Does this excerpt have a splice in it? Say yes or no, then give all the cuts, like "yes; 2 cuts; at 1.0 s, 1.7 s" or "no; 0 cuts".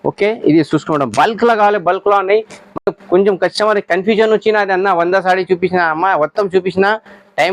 no; 0 cuts